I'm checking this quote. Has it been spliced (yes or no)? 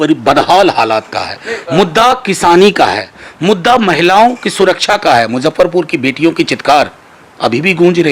no